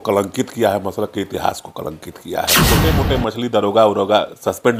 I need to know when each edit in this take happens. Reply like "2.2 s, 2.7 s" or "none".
2.6 s